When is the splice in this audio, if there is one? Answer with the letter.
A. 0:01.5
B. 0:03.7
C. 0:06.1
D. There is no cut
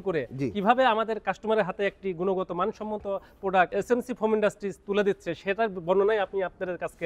B